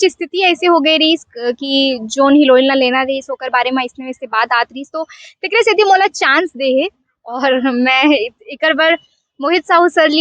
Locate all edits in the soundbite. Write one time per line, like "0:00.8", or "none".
none

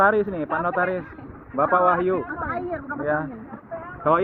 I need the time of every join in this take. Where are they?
none

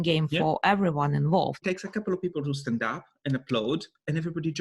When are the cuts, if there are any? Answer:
0:01.6

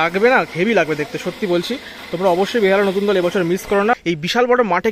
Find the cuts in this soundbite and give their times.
0:04.0

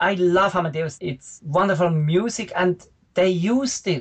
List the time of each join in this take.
0:00.9

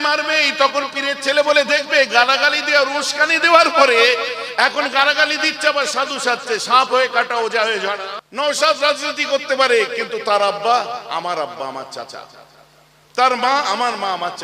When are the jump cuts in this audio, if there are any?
0:08.1

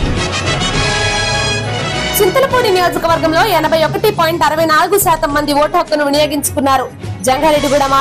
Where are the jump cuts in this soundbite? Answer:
0:02.1

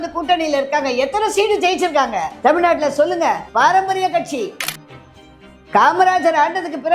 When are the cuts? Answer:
0:02.3
0:03.5
0:05.2

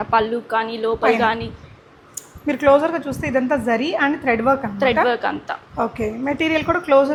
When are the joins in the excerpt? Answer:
none

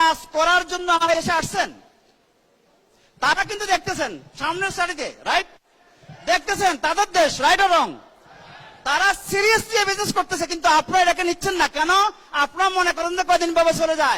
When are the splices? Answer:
0:01.1

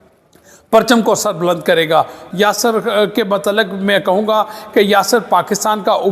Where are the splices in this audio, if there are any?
0:02.2

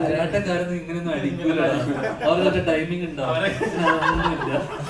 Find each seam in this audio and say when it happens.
none

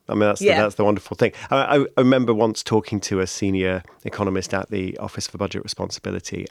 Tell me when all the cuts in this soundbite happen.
none

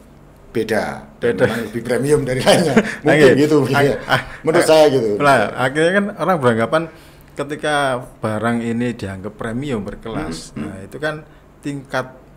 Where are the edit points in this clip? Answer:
none

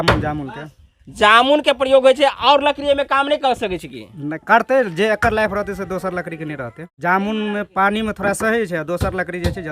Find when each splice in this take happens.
0:06.9

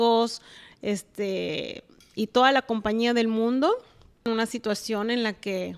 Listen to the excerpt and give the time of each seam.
0:04.2

